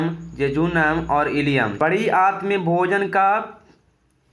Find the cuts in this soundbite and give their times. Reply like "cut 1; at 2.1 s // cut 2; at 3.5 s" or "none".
cut 1; at 1.7 s